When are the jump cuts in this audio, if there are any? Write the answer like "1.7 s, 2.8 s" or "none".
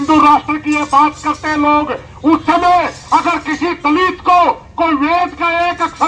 none